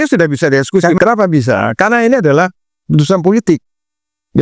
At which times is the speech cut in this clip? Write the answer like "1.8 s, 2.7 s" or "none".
1.0 s